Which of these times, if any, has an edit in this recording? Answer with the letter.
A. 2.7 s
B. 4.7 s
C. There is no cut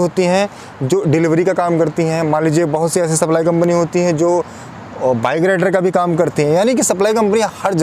C